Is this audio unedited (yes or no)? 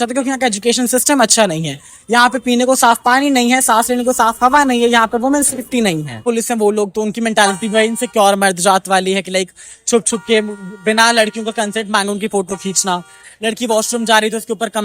no